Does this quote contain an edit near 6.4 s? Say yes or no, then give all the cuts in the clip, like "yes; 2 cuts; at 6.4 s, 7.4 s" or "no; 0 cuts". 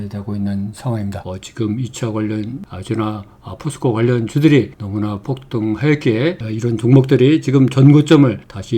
yes; 3 cuts; at 1.2 s, 2.7 s, 6.4 s